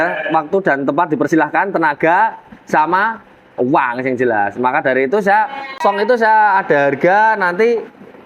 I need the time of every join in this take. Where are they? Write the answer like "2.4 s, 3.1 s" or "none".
5.8 s